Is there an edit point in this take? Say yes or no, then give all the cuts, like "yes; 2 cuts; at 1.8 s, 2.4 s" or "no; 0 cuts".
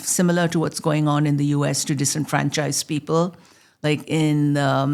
no; 0 cuts